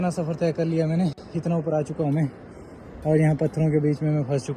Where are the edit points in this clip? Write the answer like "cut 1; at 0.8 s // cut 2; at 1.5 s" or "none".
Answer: none